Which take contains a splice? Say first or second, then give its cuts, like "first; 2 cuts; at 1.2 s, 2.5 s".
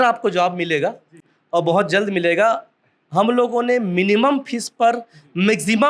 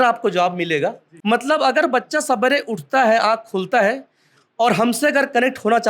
second; 1 cut; at 1.1 s